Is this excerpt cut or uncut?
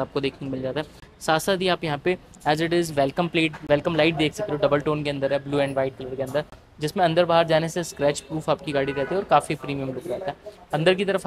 uncut